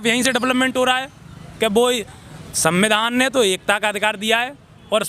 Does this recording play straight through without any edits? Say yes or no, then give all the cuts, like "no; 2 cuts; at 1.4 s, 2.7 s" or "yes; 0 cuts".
yes; 0 cuts